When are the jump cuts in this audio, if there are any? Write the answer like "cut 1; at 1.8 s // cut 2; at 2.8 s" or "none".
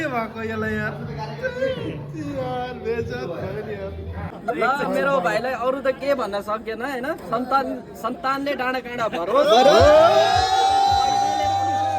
cut 1; at 4.2 s